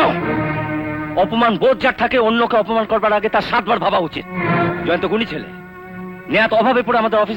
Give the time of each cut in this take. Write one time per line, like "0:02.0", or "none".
none